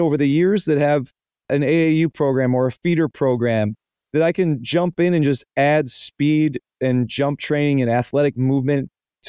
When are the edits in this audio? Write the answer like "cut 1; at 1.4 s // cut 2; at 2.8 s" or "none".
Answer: cut 1; at 1.5 s

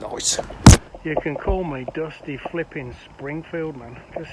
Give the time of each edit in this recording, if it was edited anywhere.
cut 1; at 0.9 s

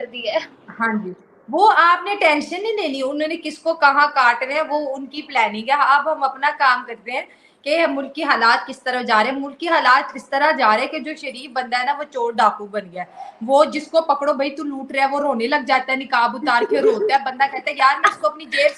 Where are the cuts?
none

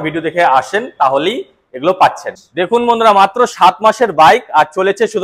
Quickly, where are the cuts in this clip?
cut 1; at 2.3 s

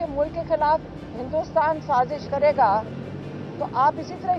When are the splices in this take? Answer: none

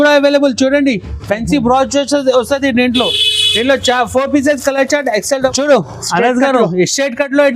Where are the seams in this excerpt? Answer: cut 1; at 5.5 s

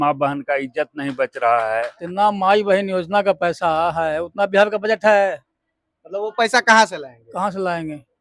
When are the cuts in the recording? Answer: cut 1; at 2.0 s

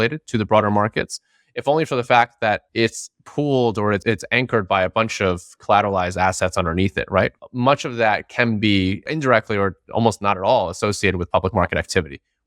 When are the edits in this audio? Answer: cut 1; at 2.7 s // cut 2; at 4.0 s // cut 3; at 7.4 s

